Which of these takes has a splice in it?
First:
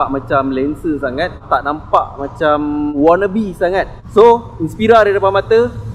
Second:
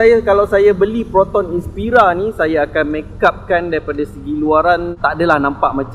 first; 3 cuts; at 1.4 s, 2.9 s, 3.9 s

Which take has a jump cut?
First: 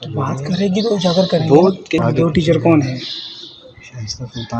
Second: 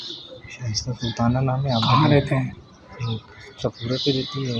first; 1 cut; at 2.0 s

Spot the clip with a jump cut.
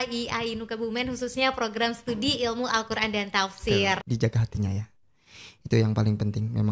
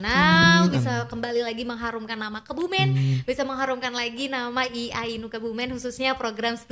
first; 1 cut; at 4.0 s

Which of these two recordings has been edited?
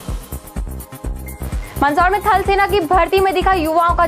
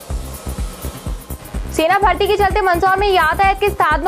second; 1 cut; at 1.3 s

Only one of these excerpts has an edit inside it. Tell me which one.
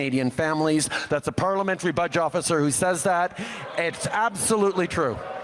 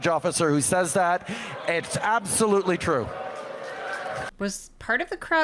second; 1 cut; at 4.4 s

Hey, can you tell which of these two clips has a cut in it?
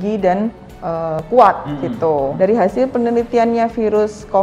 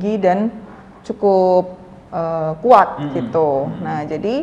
first; 2 cuts; at 1.2 s, 2.3 s

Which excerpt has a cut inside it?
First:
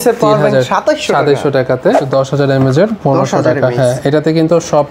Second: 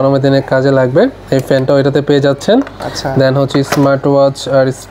first; 1 cut; at 2.0 s

